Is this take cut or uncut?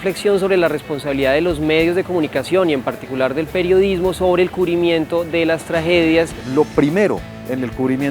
cut